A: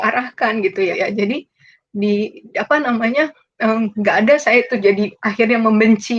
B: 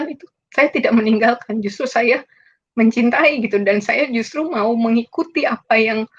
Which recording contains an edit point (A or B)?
A